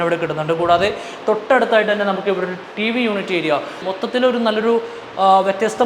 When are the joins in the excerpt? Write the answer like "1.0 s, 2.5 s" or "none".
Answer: 3.8 s

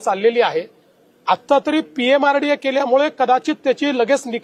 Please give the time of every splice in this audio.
none

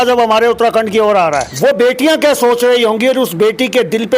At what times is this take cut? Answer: 1.5 s

